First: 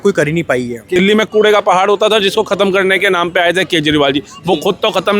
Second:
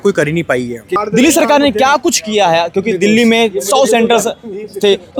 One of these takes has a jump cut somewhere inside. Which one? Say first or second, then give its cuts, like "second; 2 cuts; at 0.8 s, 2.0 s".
first; 1 cut; at 1.0 s